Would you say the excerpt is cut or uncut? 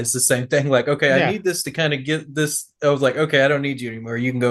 uncut